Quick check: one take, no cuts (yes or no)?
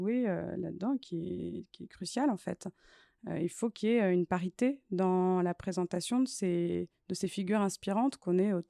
yes